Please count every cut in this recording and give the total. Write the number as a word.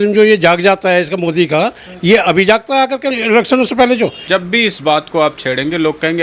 two